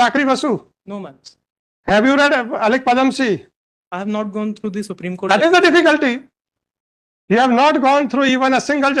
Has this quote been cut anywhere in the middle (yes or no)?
no